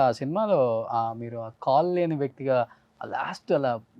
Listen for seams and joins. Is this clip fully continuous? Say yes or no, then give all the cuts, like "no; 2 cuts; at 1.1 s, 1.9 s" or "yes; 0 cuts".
yes; 0 cuts